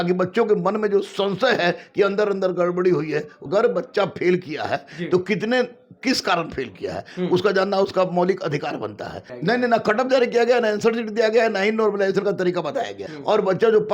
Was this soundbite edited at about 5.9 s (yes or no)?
no